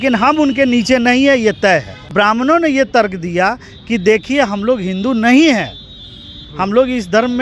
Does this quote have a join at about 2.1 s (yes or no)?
yes